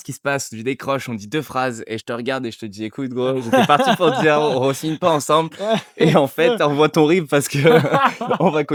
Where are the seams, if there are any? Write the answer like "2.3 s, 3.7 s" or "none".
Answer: none